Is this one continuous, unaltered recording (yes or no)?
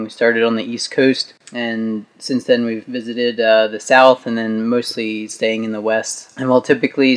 no